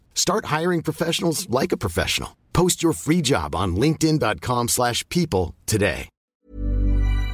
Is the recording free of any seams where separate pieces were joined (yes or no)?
no